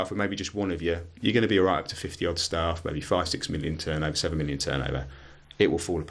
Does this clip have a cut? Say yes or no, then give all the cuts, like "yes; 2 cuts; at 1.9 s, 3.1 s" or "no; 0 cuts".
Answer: no; 0 cuts